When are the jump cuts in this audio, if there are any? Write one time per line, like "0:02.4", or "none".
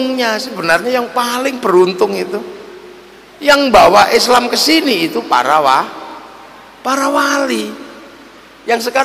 none